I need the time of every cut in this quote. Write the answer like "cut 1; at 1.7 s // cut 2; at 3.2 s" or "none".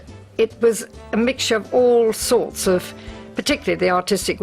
cut 1; at 1.2 s